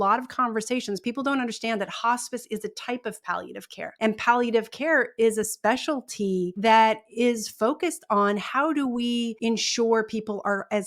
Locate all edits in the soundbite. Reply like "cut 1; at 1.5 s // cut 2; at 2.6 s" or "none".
cut 1; at 3.8 s // cut 2; at 6.5 s // cut 3; at 9.3 s